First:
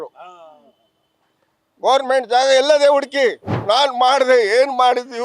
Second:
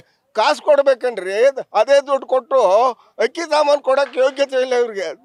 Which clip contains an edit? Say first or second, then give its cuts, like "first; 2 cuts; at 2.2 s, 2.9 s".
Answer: first; 1 cut; at 3.6 s